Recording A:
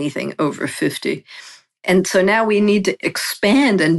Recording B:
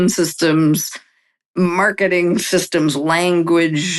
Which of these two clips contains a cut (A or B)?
A